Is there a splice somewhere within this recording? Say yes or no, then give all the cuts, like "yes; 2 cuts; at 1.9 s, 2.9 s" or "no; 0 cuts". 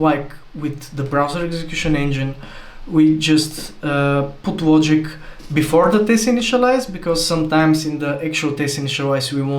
no; 0 cuts